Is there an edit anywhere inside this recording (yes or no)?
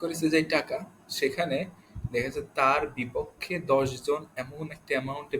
no